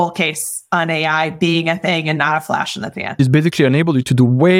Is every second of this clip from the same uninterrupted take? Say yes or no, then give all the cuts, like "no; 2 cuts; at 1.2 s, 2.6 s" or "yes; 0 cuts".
no; 1 cut; at 3.2 s